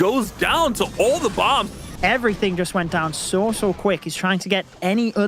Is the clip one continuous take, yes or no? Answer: no